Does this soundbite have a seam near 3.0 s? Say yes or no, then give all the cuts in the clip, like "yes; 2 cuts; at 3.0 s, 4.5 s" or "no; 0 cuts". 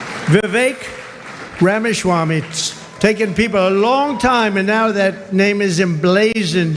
no; 0 cuts